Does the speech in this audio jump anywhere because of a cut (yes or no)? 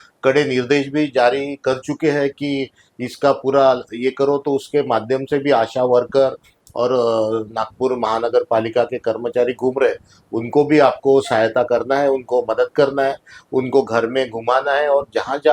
no